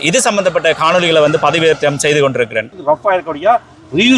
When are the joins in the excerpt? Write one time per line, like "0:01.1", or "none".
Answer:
0:02.7